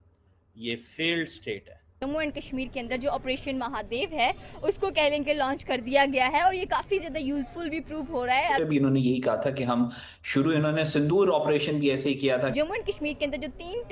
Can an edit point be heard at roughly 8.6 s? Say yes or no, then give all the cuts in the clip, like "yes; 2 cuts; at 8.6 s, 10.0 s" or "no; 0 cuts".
yes; 3 cuts; at 2.0 s, 8.6 s, 12.5 s